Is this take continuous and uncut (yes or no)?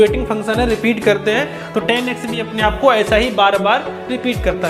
yes